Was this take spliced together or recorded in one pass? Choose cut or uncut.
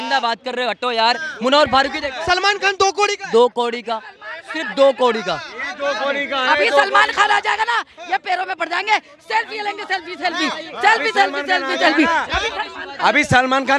uncut